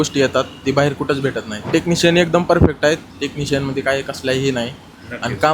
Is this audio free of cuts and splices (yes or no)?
no